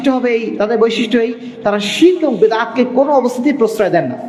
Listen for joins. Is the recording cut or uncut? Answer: uncut